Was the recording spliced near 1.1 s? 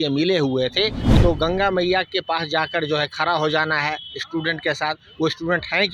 yes; 1 cut; at 1.1 s

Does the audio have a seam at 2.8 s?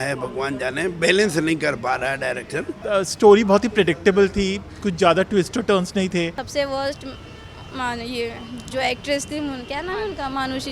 yes; 2 cuts; at 2.8 s, 6.4 s

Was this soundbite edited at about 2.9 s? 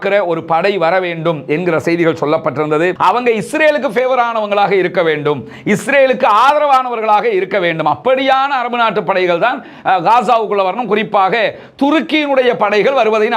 yes; 1 cut; at 2.9 s

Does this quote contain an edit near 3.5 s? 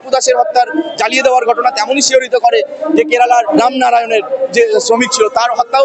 yes; 1 cut; at 3.5 s

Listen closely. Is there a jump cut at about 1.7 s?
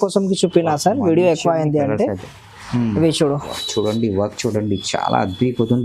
no; 1 cut; at 3.5 s

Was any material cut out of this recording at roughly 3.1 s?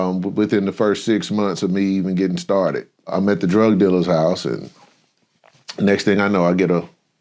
yes; 1 cut; at 3.1 s

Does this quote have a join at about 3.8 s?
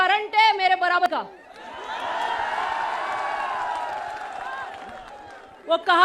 no; 1 cut; at 1.0 s

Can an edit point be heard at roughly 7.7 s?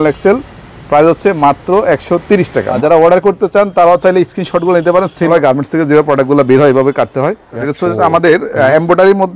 yes; 3 cuts; at 2.8 s, 5.3 s, 7.7 s

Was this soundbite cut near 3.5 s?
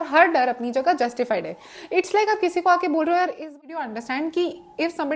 yes; 1 cut; at 3.5 s

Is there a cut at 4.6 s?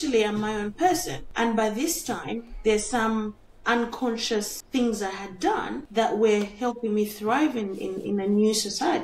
yes; 3 cuts; at 1.2 s, 4.6 s, 5.8 s

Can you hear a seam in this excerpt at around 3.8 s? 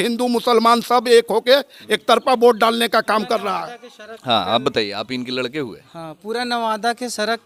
no; 0 cuts

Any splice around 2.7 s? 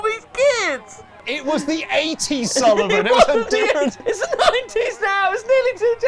no; 2 cuts; at 1.1 s, 4.0 s

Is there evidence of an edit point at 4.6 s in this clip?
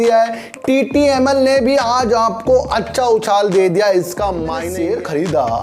yes; 1 cut; at 4.6 s

